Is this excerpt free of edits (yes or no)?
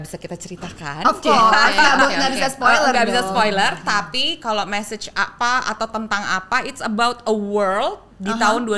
yes